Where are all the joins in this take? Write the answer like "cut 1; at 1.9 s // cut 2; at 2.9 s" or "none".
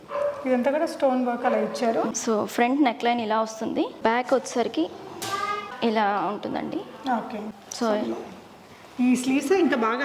cut 1; at 2.2 s // cut 2; at 3.9 s // cut 3; at 5.6 s // cut 4; at 7.6 s